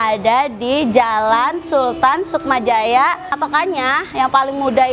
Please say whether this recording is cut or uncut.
cut